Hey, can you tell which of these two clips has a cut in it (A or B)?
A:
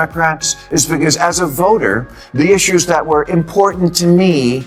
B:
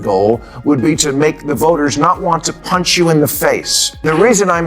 B